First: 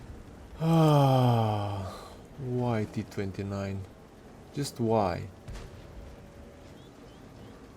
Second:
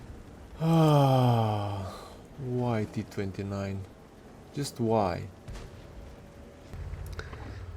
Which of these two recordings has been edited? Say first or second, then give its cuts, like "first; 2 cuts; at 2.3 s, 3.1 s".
second; 1 cut; at 6.7 s